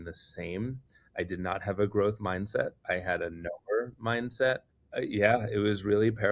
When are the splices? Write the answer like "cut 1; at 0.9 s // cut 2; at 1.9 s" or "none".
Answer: cut 1; at 4.8 s